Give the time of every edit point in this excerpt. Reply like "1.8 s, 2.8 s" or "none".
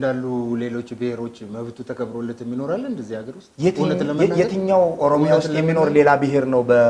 none